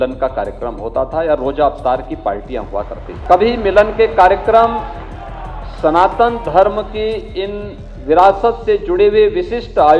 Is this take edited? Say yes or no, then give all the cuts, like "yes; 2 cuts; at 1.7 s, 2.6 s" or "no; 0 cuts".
yes; 1 cut; at 3.1 s